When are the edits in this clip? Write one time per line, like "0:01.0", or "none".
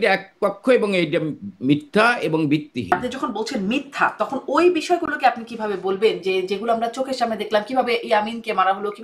0:02.9